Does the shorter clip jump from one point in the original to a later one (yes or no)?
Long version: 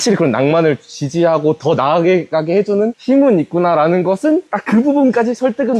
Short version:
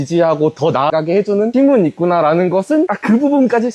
yes